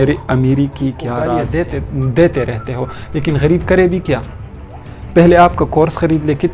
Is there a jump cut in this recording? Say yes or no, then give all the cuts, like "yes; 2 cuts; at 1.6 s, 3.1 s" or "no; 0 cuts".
yes; 1 cut; at 1.4 s